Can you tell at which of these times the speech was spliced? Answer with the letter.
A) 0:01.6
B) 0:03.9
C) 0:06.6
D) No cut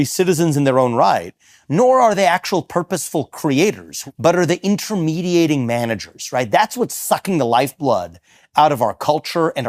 B